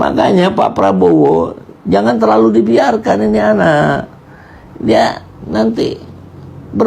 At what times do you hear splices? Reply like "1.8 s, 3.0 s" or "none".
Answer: none